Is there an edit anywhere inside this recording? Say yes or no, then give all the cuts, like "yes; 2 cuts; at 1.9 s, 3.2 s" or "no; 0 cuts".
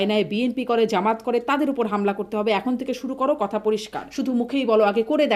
yes; 1 cut; at 4.0 s